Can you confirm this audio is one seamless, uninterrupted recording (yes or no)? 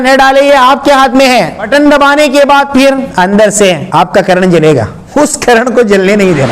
no